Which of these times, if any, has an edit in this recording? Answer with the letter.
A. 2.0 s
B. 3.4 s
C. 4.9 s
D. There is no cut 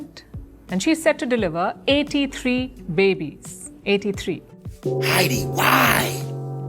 C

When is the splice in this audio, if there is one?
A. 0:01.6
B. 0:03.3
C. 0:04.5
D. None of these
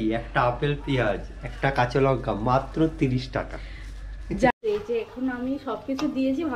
C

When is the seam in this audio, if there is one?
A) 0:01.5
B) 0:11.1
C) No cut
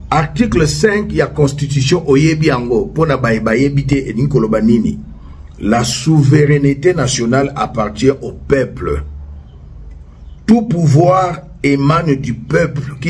C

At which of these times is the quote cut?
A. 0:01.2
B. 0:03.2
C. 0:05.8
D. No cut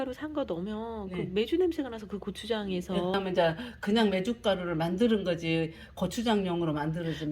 B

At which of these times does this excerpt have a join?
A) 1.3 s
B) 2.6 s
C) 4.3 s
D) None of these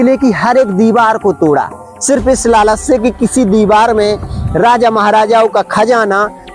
D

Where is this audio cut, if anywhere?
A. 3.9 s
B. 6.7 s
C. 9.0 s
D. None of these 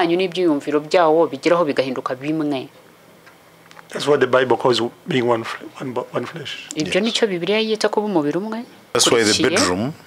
C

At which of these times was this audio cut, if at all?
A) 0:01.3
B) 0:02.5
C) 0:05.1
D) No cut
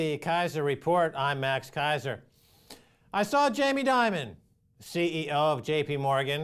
D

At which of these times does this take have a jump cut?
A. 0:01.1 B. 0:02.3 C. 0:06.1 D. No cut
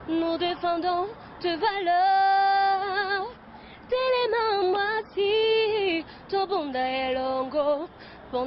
B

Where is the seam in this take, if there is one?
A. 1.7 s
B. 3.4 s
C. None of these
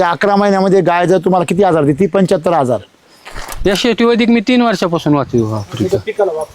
B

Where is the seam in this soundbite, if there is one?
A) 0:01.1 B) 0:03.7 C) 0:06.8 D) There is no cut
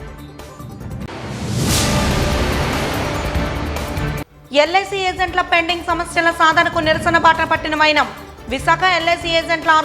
A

